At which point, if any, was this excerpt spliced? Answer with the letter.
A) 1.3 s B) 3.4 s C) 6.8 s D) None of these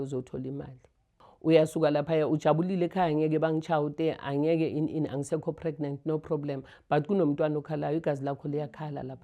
A